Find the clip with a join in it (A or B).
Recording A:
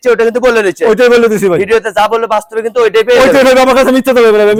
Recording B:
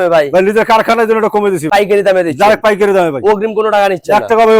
B